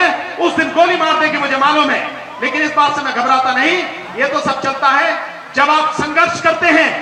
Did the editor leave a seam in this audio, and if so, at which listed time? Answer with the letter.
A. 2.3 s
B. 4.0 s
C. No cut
C